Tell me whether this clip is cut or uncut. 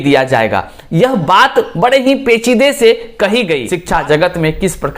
cut